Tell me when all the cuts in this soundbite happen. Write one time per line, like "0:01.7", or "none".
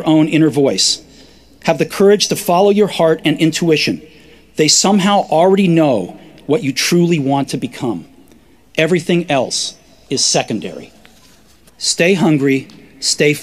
0:08.1